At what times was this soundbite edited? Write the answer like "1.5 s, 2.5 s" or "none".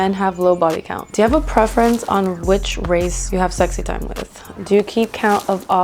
0.9 s, 4.4 s